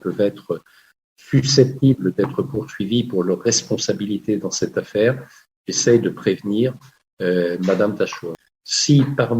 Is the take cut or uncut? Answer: cut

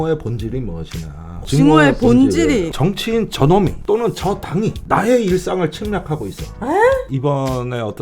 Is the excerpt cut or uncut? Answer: cut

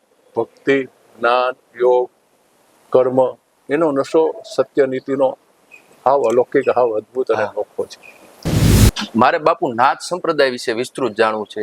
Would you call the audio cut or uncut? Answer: cut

